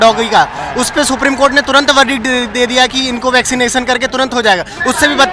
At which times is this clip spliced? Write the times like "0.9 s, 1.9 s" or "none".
none